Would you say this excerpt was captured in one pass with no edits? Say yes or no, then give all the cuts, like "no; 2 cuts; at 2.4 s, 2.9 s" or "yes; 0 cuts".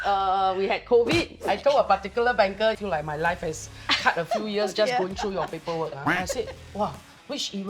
no; 3 cuts; at 1.4 s, 2.8 s, 6.1 s